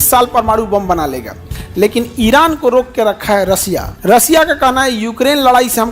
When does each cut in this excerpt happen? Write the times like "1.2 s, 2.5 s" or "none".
3.9 s